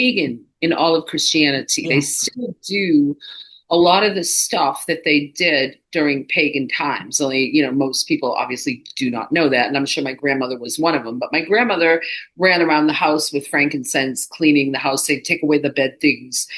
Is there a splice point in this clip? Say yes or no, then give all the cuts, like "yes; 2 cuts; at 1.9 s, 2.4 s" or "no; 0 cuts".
no; 0 cuts